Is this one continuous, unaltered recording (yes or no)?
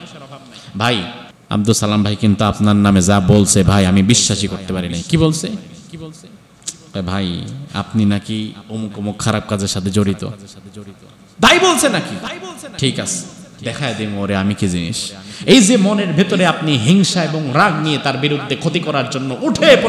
no